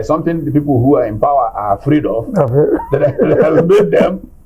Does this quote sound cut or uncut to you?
uncut